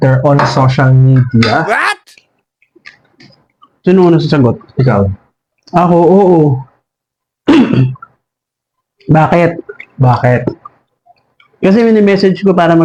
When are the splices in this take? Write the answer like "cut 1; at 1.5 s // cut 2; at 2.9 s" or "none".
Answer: none